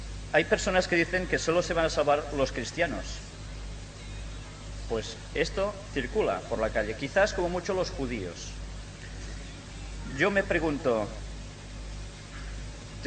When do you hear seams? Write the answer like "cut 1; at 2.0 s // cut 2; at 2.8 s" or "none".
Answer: none